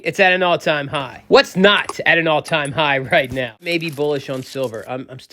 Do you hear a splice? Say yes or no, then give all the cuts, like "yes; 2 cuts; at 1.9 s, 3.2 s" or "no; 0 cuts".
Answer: yes; 1 cut; at 3.7 s